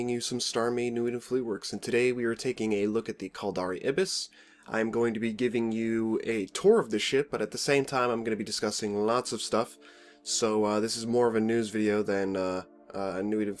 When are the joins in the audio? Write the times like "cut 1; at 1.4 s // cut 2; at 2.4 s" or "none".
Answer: cut 1; at 11.5 s